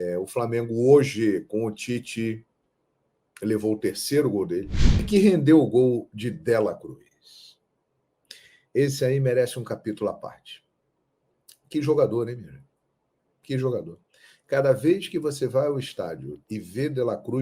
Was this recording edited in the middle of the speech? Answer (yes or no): yes